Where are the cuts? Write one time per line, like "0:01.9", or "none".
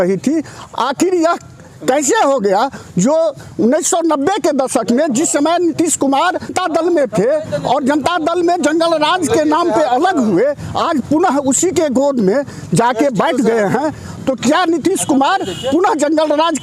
0:06.5
0:14.1